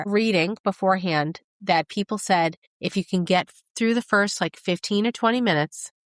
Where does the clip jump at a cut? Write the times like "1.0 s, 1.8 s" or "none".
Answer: none